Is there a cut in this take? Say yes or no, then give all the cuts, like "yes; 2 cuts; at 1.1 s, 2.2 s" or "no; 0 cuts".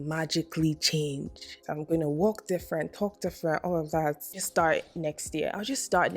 yes; 2 cuts; at 1.6 s, 4.4 s